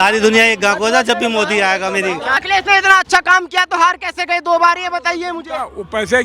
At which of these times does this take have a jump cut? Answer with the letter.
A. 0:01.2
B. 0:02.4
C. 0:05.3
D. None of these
B